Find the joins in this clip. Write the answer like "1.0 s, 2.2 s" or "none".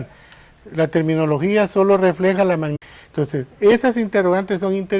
none